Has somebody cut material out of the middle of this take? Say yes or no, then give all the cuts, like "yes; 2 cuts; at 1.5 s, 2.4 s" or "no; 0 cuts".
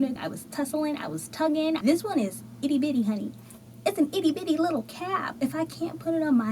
yes; 2 cuts; at 1.8 s, 5.2 s